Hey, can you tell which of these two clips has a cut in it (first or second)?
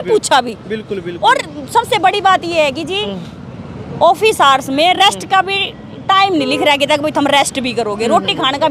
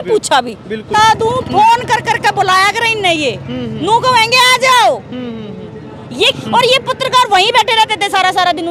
second